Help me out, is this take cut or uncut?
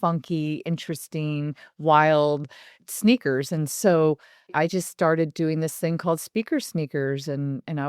cut